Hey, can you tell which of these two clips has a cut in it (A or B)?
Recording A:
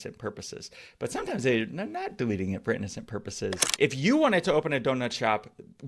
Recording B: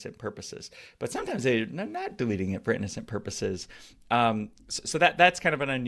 A